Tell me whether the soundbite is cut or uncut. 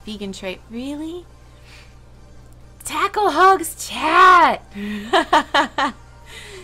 cut